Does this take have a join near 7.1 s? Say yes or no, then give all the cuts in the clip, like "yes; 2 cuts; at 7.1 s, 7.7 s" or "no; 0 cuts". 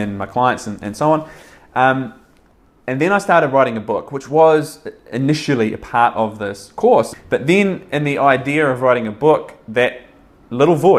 yes; 1 cut; at 7.1 s